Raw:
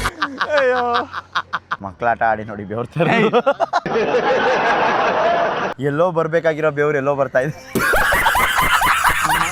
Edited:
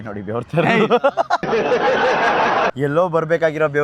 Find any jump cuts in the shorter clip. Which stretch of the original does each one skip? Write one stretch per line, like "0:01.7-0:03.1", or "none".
0:05.1-0:05.7